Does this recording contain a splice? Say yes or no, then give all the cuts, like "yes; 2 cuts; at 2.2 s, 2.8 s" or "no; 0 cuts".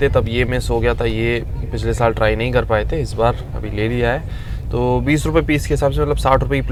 no; 0 cuts